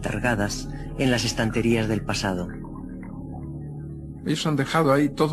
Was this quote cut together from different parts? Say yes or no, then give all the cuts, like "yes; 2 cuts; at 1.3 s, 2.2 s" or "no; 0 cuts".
no; 0 cuts